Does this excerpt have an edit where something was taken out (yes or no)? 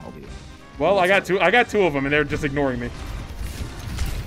no